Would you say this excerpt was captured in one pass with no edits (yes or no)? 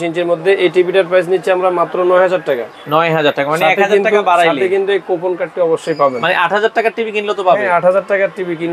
yes